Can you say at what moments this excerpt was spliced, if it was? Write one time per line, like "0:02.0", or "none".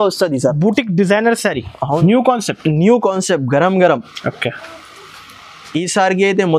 0:02.0